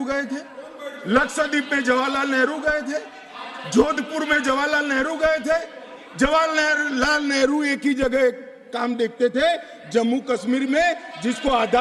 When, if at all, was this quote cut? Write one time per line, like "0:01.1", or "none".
none